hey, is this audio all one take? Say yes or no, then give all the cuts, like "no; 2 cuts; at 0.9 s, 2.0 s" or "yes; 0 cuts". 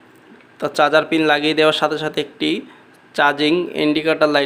yes; 0 cuts